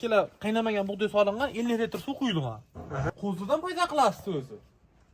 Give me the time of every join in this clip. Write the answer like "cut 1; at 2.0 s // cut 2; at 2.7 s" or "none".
cut 1; at 3.1 s